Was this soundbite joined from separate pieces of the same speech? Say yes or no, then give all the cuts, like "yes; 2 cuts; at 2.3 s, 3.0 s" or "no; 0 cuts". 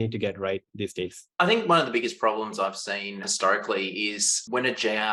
yes; 2 cuts; at 1.2 s, 3.3 s